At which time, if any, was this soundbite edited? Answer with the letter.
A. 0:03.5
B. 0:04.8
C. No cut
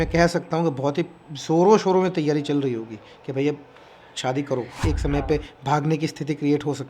B